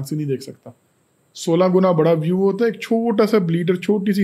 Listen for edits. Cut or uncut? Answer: uncut